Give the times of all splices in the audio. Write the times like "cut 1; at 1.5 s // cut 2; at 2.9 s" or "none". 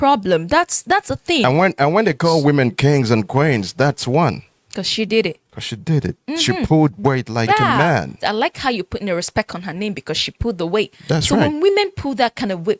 none